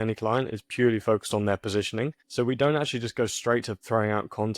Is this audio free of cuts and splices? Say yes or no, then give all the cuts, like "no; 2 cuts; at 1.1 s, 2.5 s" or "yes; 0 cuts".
no; 1 cut; at 2.2 s